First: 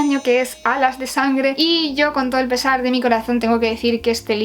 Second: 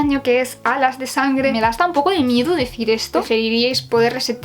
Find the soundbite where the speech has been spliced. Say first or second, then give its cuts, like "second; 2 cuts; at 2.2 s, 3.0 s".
second; 2 cuts; at 1.5 s, 3.2 s